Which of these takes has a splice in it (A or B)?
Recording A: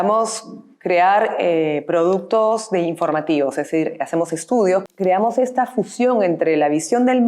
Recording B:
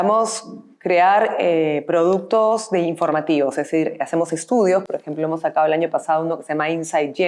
A